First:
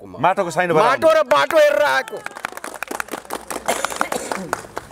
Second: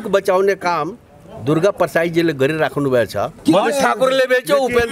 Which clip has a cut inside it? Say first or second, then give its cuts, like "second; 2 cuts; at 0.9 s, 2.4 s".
second; 1 cut; at 3.3 s